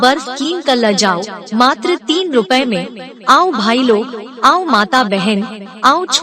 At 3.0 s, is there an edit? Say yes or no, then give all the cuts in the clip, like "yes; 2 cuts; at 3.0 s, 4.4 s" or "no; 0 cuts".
yes; 1 cut; at 3.0 s